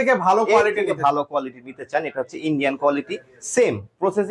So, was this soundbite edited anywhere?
no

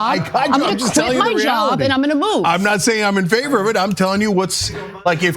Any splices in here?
yes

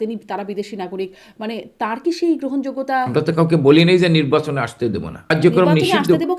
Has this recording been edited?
yes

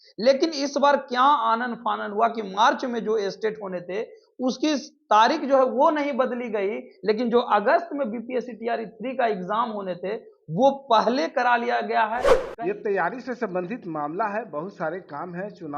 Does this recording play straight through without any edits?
no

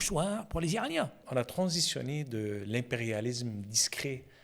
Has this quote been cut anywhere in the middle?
yes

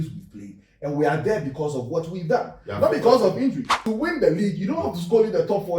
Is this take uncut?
no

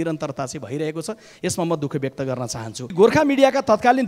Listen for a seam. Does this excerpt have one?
yes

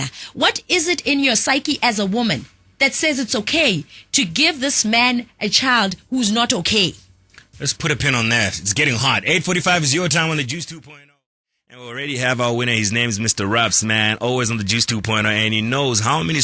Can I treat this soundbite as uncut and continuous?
yes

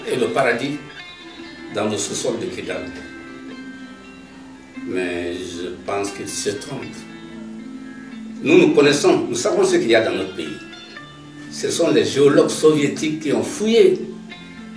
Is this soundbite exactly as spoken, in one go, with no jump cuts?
yes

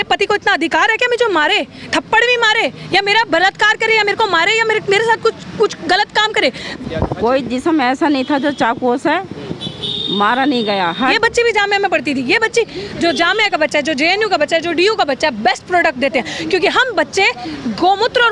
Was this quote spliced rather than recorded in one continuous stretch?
yes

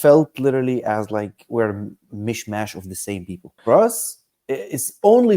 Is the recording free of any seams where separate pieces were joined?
no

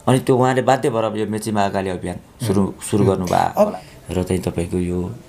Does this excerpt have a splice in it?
yes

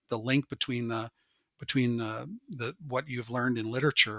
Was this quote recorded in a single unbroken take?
yes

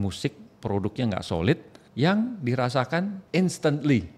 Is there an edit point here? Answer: yes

